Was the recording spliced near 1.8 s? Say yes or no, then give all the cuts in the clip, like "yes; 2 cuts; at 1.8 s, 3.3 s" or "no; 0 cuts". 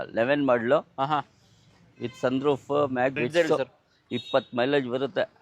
no; 1 cut; at 3.2 s